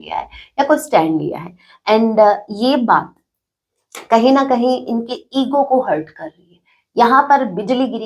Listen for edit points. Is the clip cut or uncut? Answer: uncut